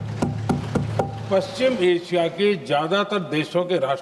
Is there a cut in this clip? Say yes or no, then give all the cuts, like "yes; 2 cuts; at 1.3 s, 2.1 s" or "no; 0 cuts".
no; 0 cuts